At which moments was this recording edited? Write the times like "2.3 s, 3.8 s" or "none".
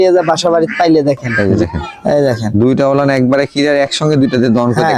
1.3 s